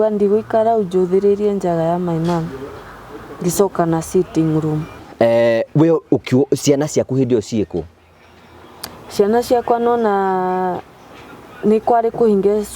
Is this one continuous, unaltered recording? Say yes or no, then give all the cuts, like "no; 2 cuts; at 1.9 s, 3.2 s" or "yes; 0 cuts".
no; 1 cut; at 5.0 s